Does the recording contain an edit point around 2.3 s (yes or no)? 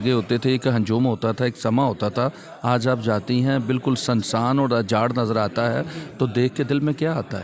no